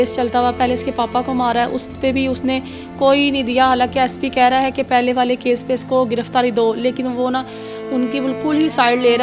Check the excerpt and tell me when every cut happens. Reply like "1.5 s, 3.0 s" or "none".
none